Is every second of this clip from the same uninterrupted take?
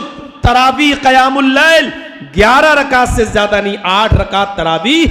yes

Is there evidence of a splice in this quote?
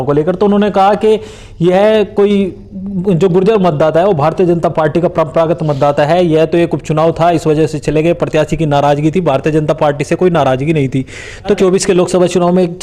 yes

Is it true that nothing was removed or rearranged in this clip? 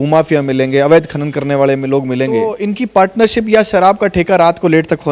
no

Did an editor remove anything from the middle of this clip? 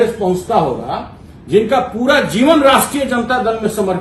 no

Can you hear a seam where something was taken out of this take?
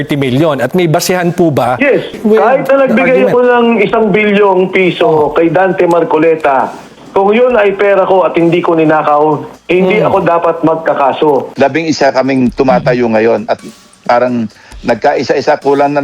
yes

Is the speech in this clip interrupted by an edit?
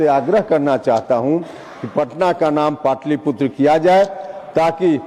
no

